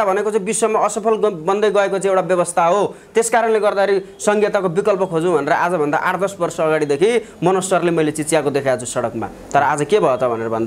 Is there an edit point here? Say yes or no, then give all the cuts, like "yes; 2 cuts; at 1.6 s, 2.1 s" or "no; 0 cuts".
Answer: no; 0 cuts